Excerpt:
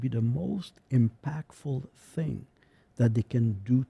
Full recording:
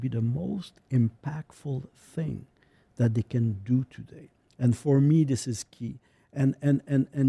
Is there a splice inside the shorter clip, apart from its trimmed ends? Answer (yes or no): no